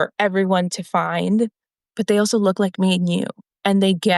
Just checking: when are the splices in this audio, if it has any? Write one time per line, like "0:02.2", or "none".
0:01.7